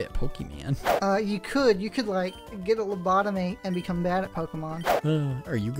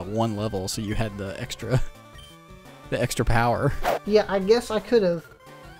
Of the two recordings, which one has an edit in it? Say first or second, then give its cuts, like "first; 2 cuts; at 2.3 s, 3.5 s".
first; 2 cuts; at 0.9 s, 4.9 s